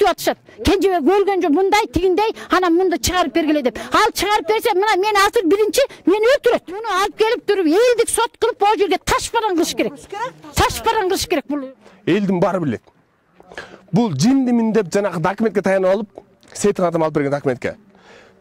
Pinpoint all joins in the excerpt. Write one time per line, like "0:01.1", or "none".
0:07.0
0:11.6